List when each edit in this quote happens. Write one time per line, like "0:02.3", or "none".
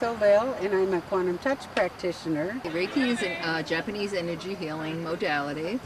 0:02.6